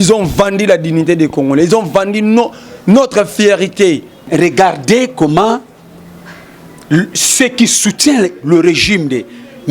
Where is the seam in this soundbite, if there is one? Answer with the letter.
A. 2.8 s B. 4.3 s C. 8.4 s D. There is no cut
B